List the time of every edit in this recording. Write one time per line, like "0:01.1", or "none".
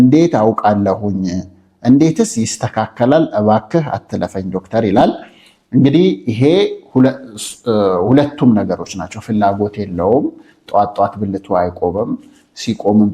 none